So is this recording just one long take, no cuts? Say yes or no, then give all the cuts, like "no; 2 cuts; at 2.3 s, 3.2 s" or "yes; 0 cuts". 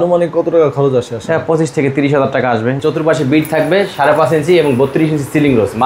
no; 1 cut; at 2.8 s